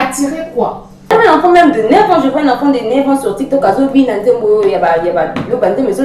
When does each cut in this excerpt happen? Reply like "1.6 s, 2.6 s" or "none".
1.1 s

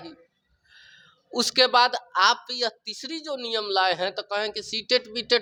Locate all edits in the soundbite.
none

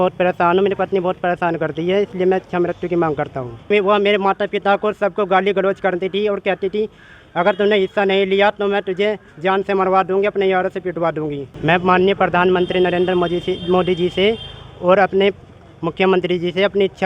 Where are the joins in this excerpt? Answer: 3.7 s, 11.5 s

